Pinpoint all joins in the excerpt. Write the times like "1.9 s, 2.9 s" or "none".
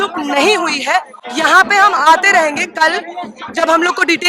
none